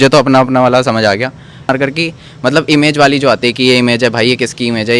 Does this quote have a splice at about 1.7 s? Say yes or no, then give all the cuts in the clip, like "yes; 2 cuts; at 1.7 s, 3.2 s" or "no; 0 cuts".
yes; 1 cut; at 1.7 s